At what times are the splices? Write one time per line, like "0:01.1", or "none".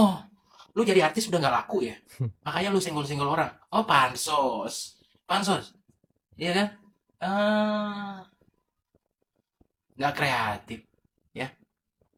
none